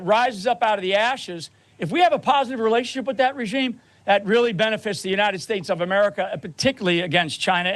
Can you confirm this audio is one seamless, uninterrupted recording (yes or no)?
yes